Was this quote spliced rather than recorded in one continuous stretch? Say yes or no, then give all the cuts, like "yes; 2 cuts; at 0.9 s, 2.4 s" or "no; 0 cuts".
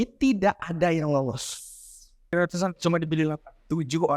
yes; 1 cut; at 2.3 s